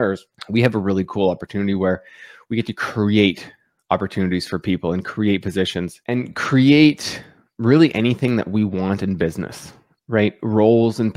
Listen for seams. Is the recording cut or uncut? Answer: uncut